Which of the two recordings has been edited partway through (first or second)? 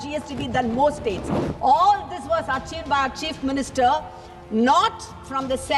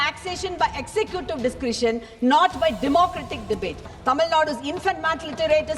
second